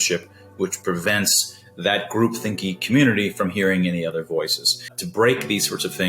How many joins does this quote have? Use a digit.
1